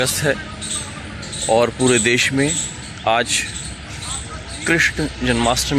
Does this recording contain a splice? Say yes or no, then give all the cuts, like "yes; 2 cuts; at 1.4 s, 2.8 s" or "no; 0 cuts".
no; 0 cuts